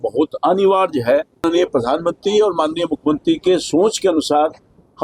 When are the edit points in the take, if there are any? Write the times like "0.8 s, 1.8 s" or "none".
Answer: 1.4 s